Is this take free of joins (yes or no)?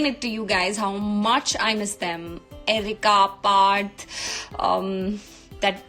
yes